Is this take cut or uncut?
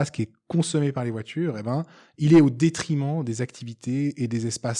uncut